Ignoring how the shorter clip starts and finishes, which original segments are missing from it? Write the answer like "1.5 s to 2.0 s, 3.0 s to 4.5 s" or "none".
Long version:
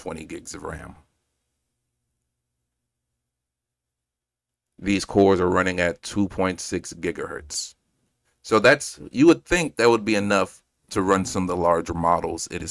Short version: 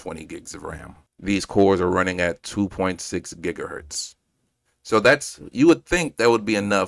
1.0 s to 4.6 s